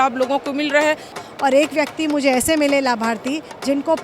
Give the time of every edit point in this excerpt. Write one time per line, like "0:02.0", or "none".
0:01.2